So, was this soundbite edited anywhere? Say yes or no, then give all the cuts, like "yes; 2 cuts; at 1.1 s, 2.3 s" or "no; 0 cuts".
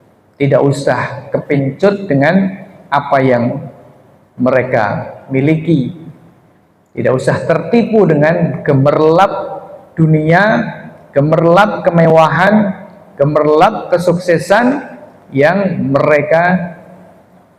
no; 0 cuts